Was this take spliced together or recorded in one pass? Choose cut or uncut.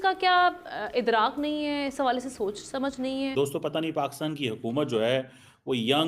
cut